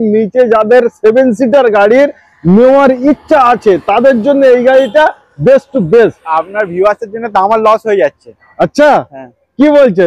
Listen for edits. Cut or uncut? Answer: uncut